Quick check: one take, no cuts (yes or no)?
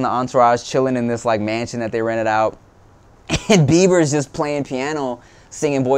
yes